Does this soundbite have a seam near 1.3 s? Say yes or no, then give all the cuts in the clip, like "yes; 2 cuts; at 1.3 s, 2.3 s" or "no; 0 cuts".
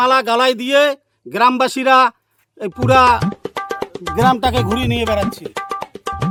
no; 0 cuts